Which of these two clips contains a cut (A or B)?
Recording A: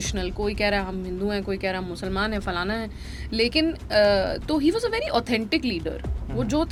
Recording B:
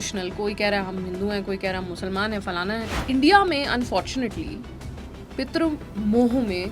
B